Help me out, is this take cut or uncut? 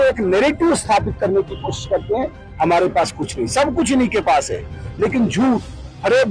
uncut